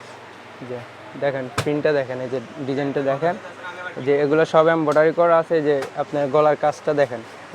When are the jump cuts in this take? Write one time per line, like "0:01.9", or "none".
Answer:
none